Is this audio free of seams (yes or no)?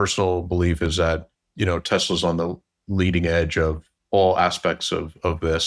no